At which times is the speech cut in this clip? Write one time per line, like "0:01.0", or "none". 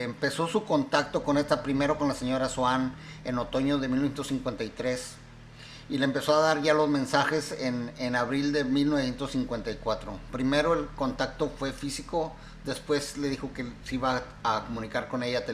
0:09.5